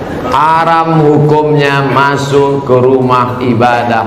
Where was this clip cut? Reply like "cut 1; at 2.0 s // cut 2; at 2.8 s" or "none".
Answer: none